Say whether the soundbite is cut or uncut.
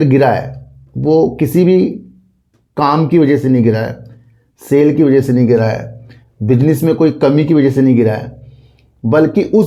uncut